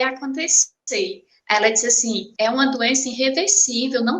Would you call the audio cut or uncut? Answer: cut